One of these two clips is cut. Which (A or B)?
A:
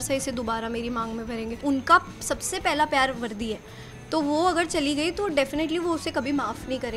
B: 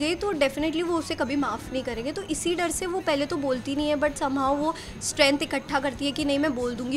A